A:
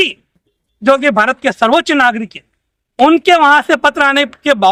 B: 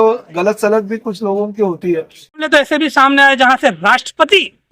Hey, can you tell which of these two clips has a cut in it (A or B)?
B